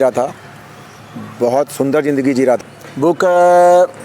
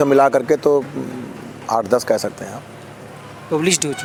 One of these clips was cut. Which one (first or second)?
first